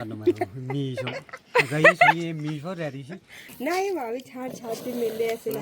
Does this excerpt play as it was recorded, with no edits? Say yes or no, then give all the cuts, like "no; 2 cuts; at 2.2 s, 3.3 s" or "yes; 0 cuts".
no; 1 cut; at 3.4 s